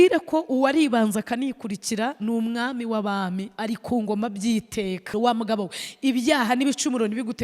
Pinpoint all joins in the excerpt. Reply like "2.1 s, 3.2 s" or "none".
5.1 s